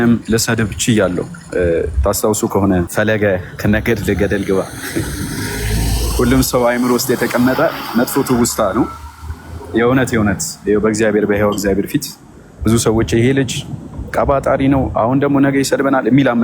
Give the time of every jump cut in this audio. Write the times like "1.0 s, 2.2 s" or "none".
2.9 s